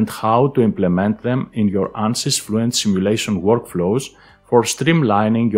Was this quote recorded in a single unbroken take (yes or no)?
yes